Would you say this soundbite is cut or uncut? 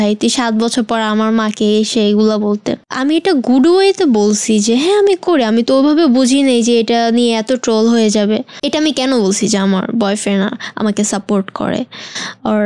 cut